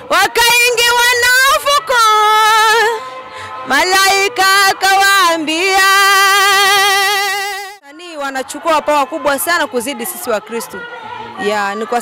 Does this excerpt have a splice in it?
yes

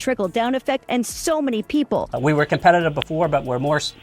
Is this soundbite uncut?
no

